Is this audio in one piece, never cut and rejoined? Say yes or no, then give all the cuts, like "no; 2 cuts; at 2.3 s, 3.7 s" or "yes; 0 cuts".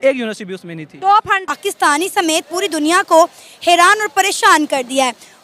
no; 1 cut; at 1.5 s